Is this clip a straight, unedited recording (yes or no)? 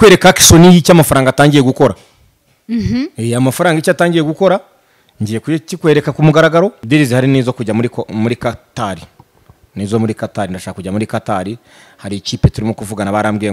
no